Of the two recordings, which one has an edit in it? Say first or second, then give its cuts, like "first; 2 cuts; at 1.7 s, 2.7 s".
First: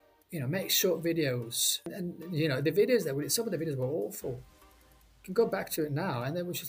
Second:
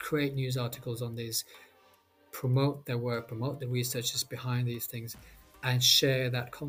first; 1 cut; at 1.9 s